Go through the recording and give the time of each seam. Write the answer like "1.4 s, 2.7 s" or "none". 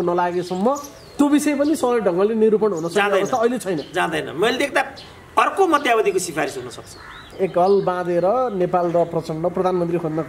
7.2 s